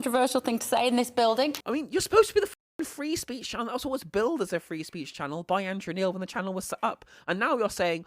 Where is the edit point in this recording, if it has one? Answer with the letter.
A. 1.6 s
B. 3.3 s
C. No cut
A